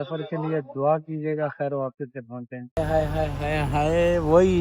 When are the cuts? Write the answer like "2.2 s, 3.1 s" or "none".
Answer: 2.8 s